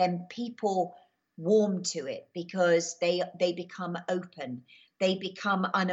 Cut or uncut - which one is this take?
uncut